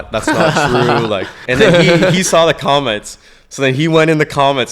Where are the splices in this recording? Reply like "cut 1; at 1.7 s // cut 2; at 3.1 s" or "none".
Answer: cut 1; at 1.4 s